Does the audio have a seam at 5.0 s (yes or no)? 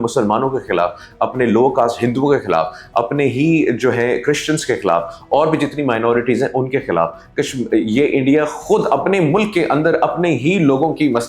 no